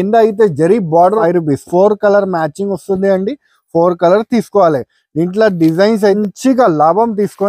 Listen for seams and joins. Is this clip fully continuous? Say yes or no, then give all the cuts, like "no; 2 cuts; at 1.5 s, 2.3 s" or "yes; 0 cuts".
no; 2 cuts; at 1.2 s, 6.2 s